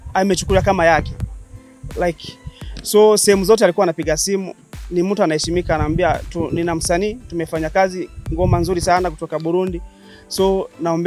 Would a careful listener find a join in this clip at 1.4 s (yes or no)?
no